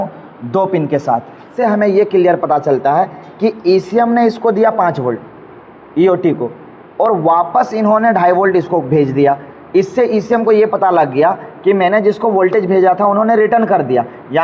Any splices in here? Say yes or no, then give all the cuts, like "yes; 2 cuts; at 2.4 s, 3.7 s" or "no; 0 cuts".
yes; 1 cut; at 1.5 s